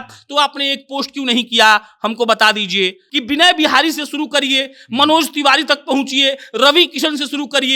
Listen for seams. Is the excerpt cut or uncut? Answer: cut